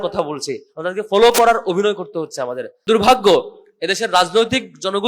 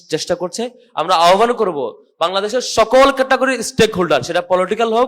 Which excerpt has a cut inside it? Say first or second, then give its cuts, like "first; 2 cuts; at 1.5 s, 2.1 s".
first; 1 cut; at 2.8 s